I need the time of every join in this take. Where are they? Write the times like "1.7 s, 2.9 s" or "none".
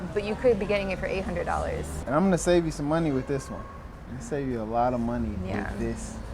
2.0 s

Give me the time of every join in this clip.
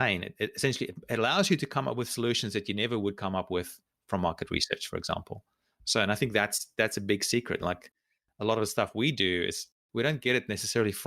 9.7 s

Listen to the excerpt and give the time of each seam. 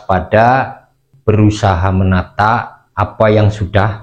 2.8 s

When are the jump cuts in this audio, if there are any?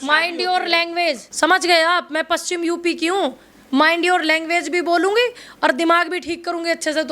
1.3 s

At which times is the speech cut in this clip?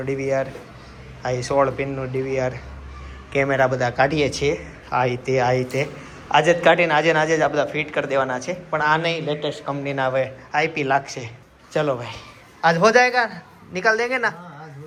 none

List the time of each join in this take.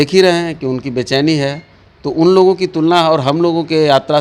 none

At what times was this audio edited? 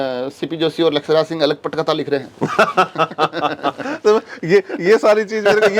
none

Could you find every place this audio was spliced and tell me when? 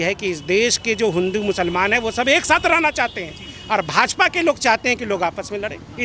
none

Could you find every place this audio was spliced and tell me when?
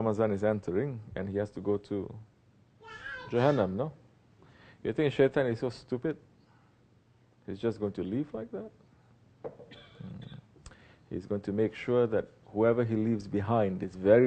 5.3 s

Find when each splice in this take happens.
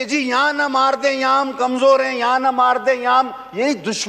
none

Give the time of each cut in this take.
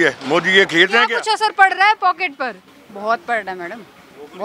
1.1 s

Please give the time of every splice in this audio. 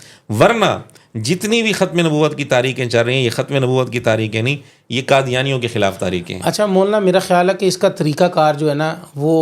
none

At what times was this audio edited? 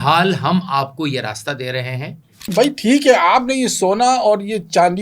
2.5 s

